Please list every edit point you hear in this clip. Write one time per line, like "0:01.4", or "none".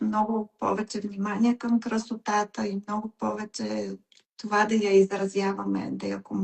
none